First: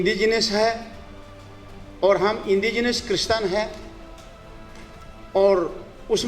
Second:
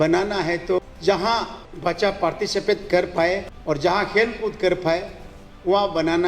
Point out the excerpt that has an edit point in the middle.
second; 3 cuts; at 0.8 s, 1.6 s, 3.5 s

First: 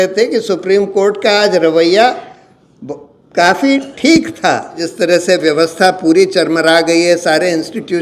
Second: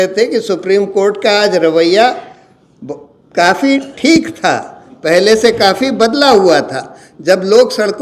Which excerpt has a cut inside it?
first; 1 cut; at 4.9 s

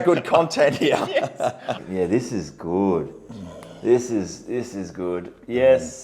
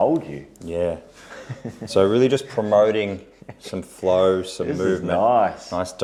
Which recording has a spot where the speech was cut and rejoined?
first; 1 cut; at 1.8 s

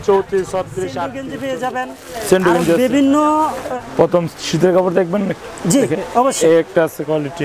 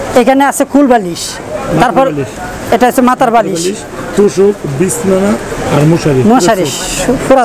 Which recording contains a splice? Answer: first; 2 cuts; at 1.3 s, 3.7 s

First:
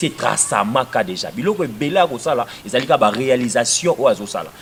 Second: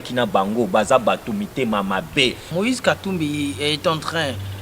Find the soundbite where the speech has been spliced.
second; 1 cut; at 2.4 s

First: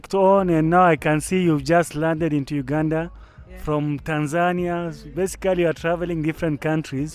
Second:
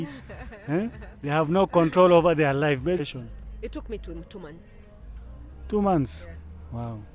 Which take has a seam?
second; 1 cut; at 3.0 s

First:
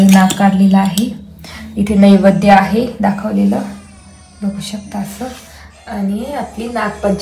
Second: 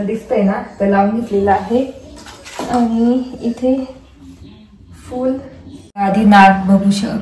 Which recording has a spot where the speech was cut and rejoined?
second; 1 cut; at 6.1 s

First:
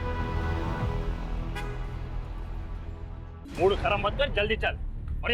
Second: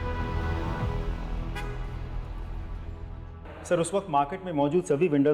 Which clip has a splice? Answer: first; 1 cut; at 3.4 s

